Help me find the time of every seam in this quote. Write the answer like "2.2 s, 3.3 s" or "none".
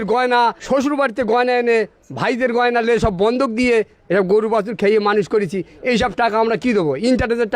none